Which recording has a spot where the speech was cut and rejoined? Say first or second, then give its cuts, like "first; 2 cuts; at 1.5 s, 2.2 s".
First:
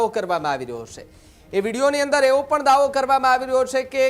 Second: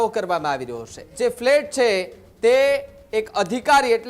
second; 1 cut; at 1.1 s